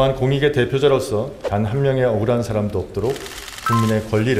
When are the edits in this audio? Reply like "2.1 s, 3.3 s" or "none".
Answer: 1.4 s